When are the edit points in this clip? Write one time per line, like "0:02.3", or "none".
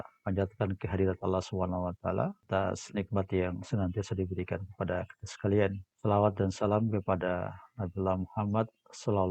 0:02.4
0:05.9